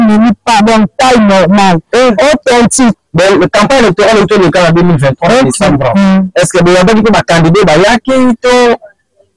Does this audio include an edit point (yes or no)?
yes